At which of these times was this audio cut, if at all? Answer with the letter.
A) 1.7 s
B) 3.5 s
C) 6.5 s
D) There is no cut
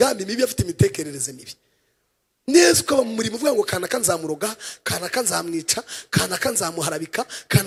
D